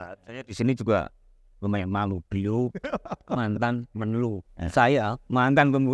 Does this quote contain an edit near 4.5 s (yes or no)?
yes